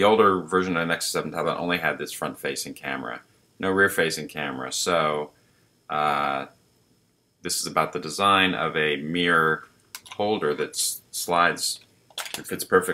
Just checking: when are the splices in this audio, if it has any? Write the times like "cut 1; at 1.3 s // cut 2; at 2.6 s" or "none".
cut 1; at 1.4 s